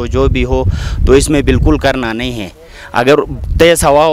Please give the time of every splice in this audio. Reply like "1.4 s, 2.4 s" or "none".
none